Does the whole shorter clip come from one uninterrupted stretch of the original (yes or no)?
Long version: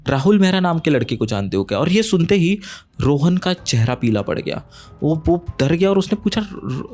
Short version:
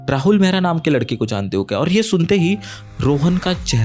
yes